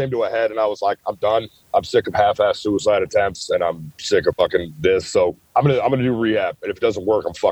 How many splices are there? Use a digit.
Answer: 2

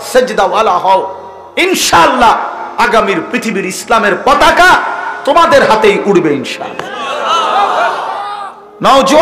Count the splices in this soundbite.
0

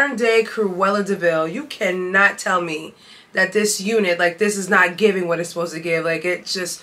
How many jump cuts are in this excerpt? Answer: 0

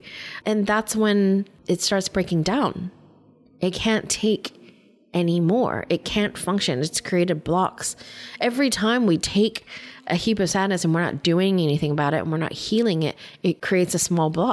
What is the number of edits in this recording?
0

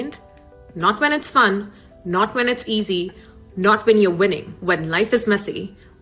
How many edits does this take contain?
1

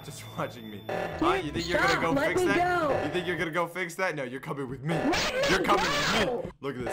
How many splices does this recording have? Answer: 0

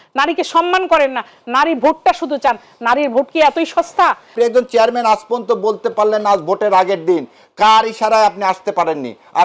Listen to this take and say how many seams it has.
1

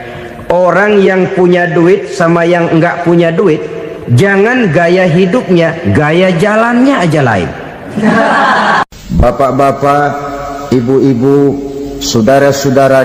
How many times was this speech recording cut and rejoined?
1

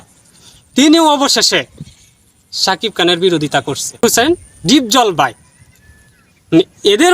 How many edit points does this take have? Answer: 1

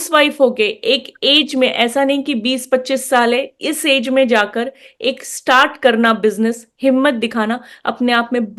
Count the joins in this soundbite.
0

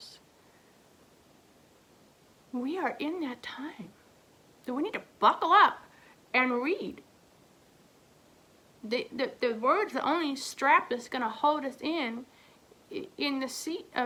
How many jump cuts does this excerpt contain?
0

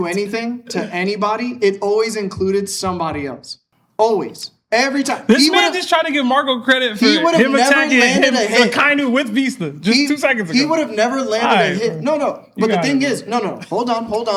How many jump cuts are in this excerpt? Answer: 0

